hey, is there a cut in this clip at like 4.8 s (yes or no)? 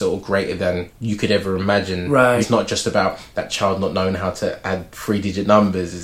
no